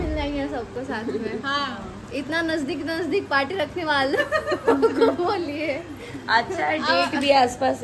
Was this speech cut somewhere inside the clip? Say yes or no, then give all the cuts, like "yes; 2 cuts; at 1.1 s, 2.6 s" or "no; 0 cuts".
no; 0 cuts